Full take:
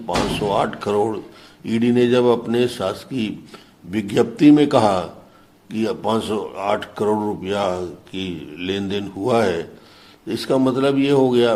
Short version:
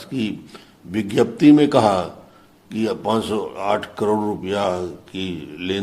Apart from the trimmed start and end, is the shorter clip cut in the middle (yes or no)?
no